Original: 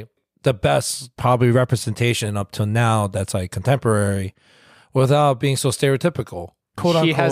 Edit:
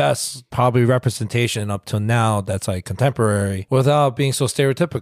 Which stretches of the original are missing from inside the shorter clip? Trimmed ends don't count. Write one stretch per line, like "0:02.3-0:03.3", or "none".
0:04.3-0:04.8